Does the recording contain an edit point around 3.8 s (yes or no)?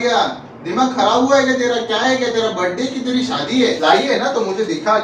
yes